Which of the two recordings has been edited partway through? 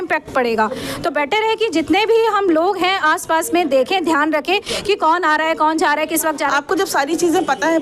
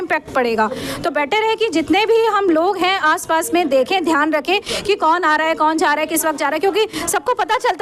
first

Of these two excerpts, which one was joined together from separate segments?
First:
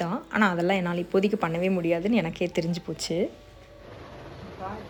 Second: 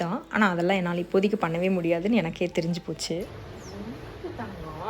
second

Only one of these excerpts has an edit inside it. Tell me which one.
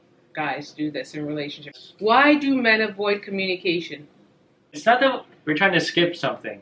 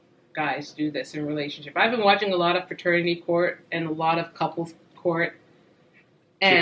first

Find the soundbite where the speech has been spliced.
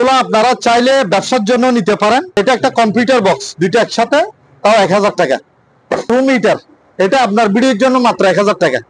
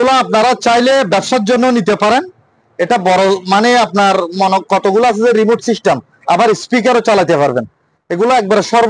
first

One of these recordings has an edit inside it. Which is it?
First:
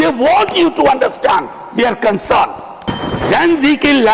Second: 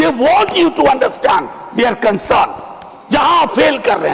first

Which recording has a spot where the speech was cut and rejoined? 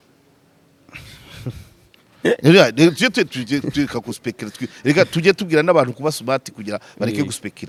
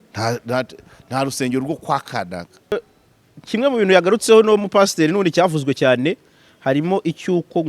second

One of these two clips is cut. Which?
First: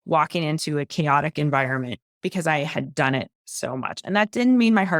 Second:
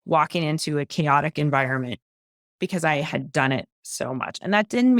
first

